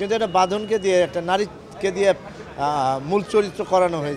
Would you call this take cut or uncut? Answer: uncut